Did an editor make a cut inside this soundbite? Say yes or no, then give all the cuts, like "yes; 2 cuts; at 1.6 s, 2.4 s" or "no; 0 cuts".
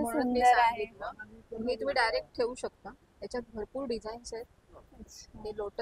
no; 0 cuts